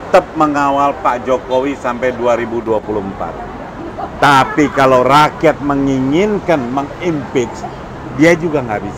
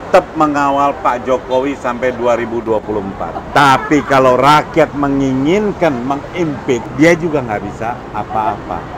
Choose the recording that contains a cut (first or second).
second